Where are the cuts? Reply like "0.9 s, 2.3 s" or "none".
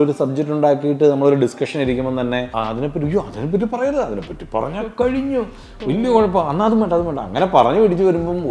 2.5 s